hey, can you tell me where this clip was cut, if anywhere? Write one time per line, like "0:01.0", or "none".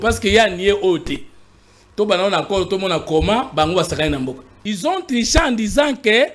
0:04.5